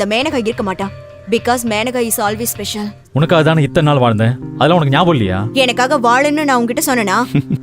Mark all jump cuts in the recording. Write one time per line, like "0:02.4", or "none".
0:03.0